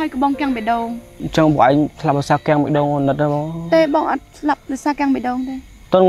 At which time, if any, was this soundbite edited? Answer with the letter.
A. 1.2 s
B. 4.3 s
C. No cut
A